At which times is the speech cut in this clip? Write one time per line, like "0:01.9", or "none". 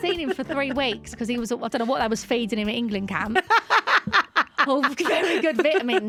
none